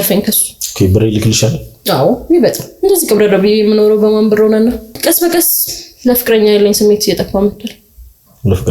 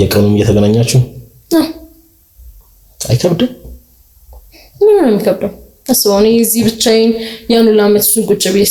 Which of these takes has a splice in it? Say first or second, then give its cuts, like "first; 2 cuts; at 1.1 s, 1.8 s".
first; 1 cut; at 4.9 s